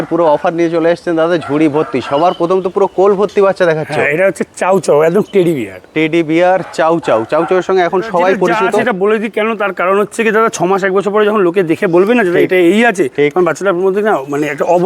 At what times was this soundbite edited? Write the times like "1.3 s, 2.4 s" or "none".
8.8 s